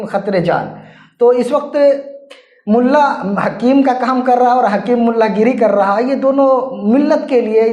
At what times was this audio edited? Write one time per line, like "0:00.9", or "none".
none